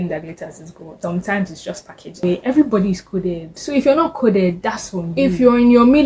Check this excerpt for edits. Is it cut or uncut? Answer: cut